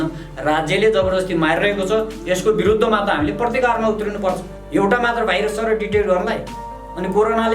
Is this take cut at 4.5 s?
yes; 1 cut; at 4.5 s

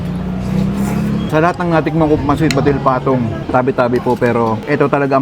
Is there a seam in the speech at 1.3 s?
yes; 1 cut; at 1.3 s

